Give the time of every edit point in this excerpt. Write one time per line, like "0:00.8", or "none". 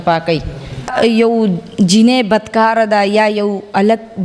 0:00.9